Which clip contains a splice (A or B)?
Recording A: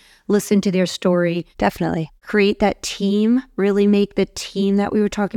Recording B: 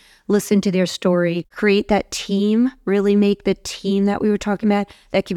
B